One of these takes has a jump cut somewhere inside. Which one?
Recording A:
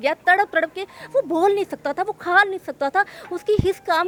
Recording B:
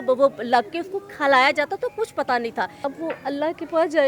B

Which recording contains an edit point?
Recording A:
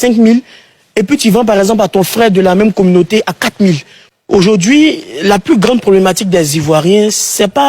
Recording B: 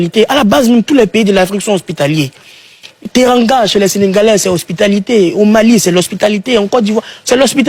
A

